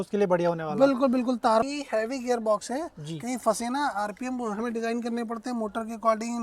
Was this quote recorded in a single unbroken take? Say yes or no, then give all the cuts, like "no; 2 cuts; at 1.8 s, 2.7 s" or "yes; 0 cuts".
no; 1 cut; at 1.6 s